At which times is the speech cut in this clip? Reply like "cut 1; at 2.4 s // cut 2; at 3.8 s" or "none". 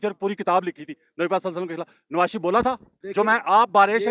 cut 1; at 2.9 s